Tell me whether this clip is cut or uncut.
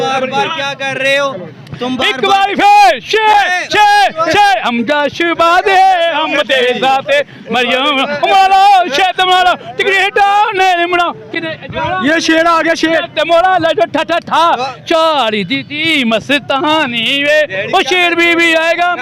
uncut